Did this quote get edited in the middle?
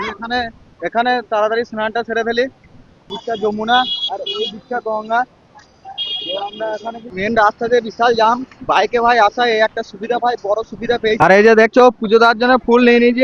yes; 3 cuts; at 2.6 s, 7.0 s, 11.2 s

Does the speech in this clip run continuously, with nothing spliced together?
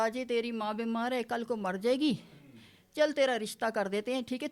yes; 0 cuts

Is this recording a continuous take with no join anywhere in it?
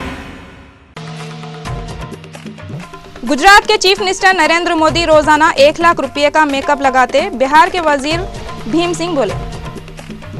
yes; 0 cuts

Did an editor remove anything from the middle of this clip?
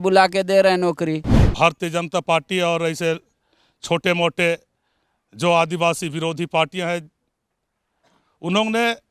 yes; 1 cut; at 1.3 s

